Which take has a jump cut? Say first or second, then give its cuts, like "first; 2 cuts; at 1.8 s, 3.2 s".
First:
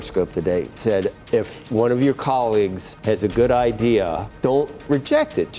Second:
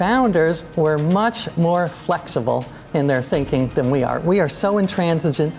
first; 3 cuts; at 1.1 s, 2.9 s, 4.3 s